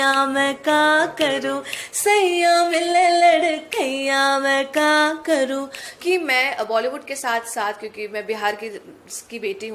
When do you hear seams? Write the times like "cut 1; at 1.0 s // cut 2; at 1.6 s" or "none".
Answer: cut 1; at 5.9 s

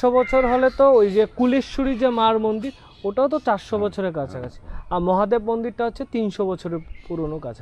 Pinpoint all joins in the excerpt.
none

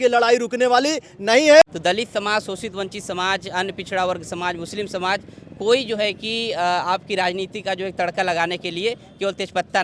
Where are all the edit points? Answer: cut 1; at 1.6 s

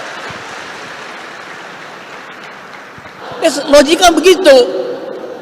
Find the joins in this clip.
cut 1; at 3.2 s

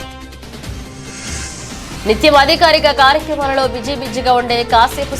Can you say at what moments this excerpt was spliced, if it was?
cut 1; at 1.3 s

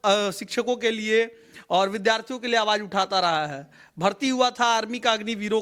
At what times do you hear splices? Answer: none

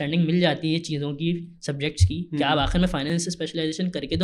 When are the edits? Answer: cut 1; at 3.1 s

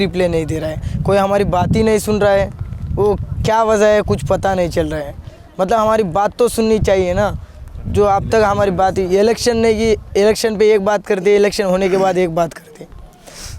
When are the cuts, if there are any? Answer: none

